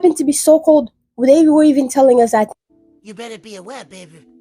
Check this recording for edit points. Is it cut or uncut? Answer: cut